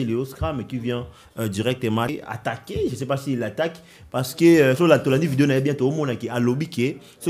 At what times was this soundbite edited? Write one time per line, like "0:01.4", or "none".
0:02.1

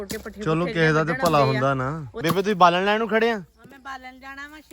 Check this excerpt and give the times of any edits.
0:02.1

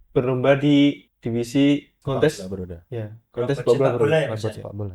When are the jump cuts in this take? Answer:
none

